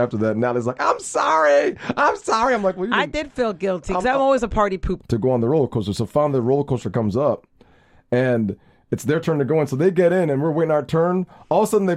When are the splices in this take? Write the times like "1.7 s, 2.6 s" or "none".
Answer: 4.9 s